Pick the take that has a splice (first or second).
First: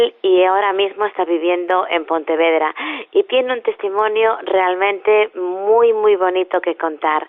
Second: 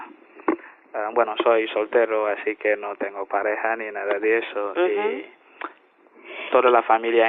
first